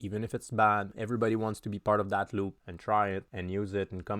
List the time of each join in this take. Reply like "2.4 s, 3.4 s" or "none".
0.9 s, 2.7 s, 3.3 s